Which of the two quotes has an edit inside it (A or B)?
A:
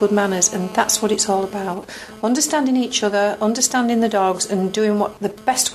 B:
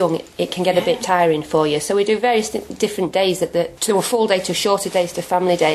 B